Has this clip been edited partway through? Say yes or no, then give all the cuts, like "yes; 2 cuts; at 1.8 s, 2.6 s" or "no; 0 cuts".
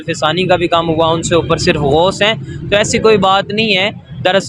no; 0 cuts